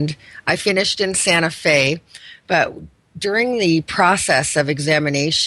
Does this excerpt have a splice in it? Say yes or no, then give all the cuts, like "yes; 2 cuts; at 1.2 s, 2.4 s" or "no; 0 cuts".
no; 0 cuts